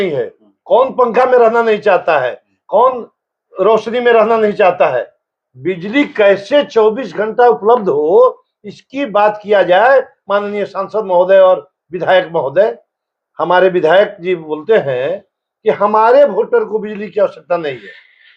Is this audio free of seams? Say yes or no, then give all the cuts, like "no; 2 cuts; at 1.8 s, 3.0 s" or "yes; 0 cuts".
yes; 0 cuts